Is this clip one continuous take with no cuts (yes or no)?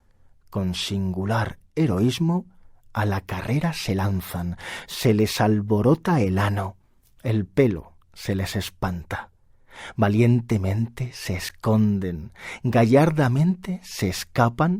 no